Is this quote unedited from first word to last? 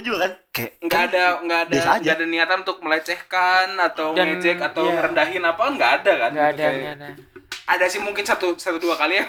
yes; 0 cuts

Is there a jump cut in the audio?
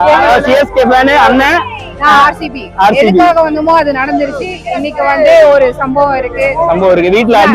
no; 0 cuts

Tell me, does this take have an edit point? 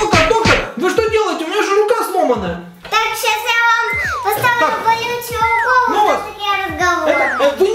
yes; 1 cut; at 2.7 s

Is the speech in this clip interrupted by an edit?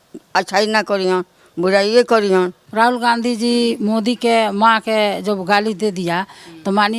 yes; 1 cut; at 2.6 s

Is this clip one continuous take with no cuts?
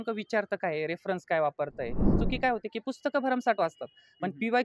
no; 1 cut; at 2.2 s

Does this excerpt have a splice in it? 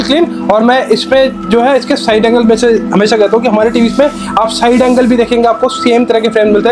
no; 0 cuts

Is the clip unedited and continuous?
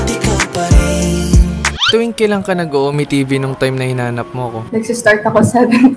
no; 1 cut; at 1.8 s

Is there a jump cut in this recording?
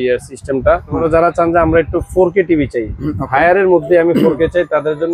yes; 1 cut; at 1.1 s

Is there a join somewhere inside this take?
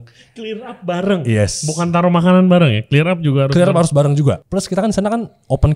yes; 1 cut; at 4.4 s

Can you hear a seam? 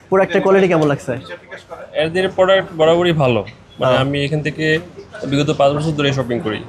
no; 0 cuts

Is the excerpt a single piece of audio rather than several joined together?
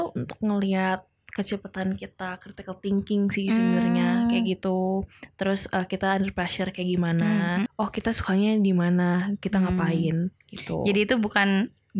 no; 1 cut; at 7.7 s

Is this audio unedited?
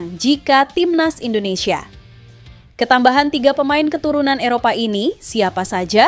yes; 0 cuts

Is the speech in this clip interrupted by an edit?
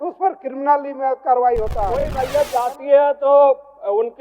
yes; 1 cut; at 2.2 s

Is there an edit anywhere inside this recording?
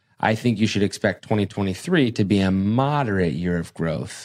no; 0 cuts

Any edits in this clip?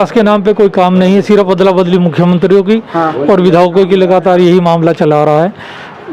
no; 0 cuts

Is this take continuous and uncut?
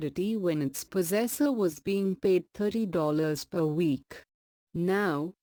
yes; 0 cuts

